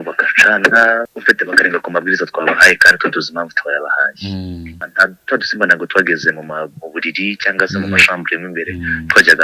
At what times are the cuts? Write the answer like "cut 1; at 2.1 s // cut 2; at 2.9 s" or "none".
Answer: cut 1; at 1.1 s // cut 2; at 4.9 s